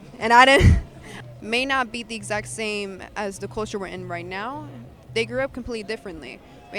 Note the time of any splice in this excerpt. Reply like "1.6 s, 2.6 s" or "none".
1.1 s